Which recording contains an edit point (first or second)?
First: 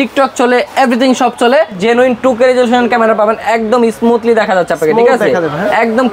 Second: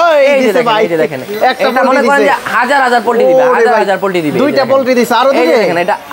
first